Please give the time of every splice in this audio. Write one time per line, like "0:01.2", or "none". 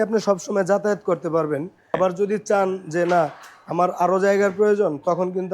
0:01.9